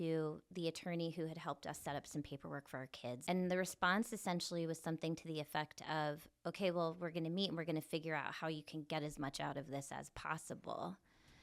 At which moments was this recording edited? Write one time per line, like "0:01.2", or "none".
0:03.2

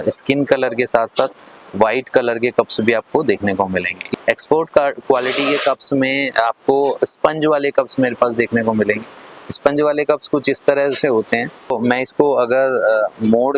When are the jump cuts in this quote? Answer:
0:04.0
0:11.7

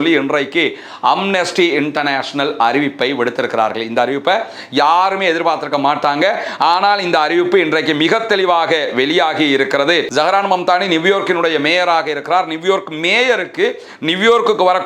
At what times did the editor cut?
0:10.1

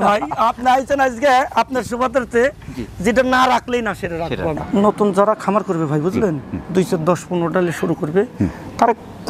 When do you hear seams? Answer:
0:04.6

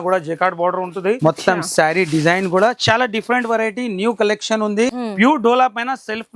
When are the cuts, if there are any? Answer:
0:01.2
0:05.0

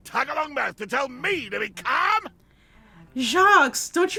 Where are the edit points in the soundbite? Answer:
none

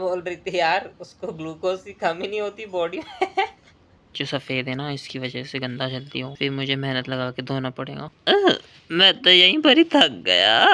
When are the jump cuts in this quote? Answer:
0:04.2
0:06.3

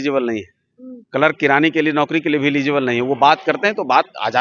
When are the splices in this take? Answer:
none

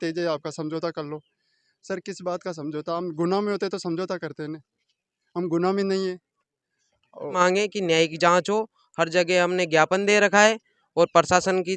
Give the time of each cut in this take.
0:01.6
0:07.4

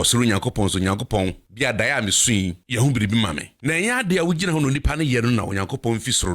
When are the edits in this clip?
0:01.4
0:02.6
0:03.5

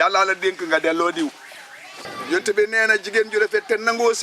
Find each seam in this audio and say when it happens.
0:02.1

